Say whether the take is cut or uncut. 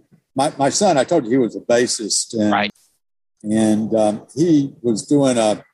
cut